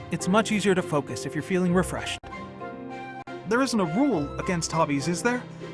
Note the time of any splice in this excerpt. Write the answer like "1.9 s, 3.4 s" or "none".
2.0 s, 3.4 s

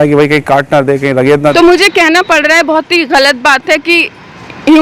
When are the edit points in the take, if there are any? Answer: 1.5 s

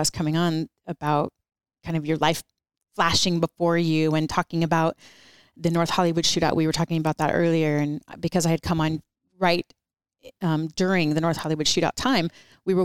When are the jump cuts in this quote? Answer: none

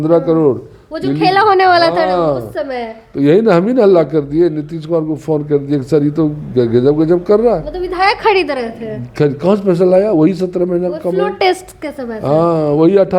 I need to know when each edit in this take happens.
none

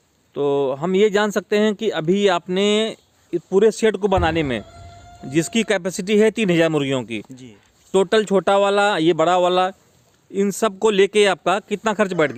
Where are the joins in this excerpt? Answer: none

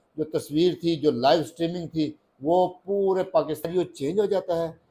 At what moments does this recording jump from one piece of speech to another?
3.6 s

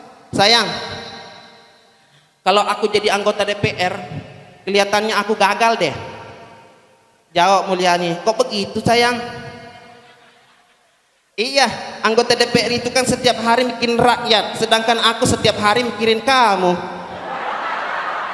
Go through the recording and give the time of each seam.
17.1 s

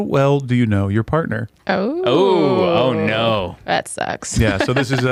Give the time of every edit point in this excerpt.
none

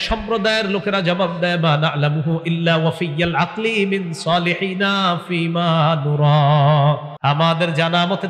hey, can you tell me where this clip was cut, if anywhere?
7.1 s

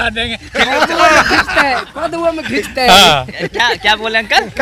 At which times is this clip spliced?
none

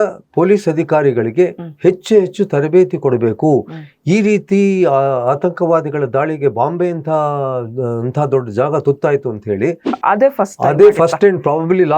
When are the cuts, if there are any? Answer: 9.9 s

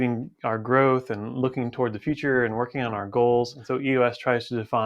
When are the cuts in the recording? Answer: 3.6 s

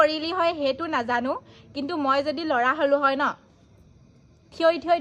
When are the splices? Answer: none

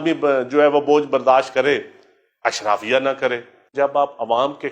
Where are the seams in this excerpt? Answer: 3.7 s

